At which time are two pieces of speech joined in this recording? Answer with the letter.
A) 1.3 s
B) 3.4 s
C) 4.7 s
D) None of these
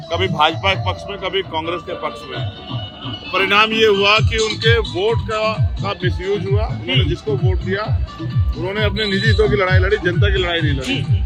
D